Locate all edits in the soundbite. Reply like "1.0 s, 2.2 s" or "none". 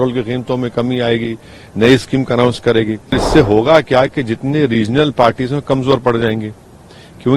3.2 s